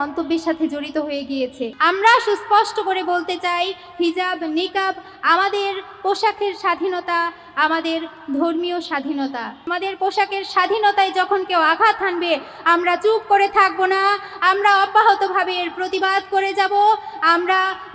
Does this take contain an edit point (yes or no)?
yes